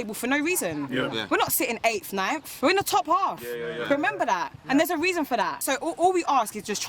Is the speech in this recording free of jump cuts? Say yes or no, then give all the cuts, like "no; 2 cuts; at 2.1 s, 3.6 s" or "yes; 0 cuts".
yes; 0 cuts